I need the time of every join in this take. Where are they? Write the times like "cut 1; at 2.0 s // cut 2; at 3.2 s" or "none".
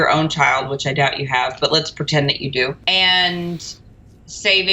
cut 1; at 2.8 s